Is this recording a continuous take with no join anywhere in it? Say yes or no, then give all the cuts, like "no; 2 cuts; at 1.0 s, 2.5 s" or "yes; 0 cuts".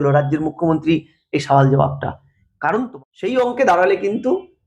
no; 1 cut; at 3.4 s